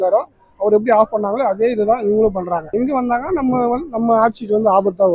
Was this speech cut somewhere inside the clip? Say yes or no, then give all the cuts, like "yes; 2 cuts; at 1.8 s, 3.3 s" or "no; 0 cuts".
no; 0 cuts